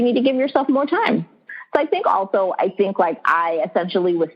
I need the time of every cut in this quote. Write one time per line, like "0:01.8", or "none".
0:01.5